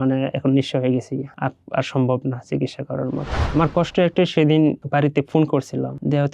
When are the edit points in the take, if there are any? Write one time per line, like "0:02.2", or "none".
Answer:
0:03.4